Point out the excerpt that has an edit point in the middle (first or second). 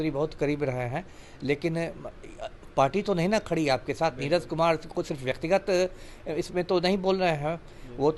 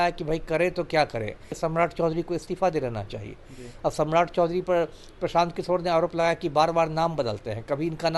second